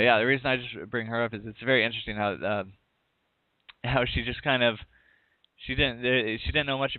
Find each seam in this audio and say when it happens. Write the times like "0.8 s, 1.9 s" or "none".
none